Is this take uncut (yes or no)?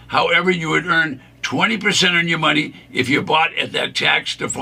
yes